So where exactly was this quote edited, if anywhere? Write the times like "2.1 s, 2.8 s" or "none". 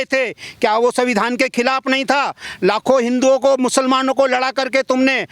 none